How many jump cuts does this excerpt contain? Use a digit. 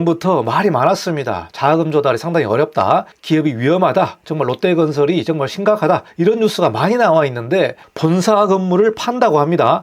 2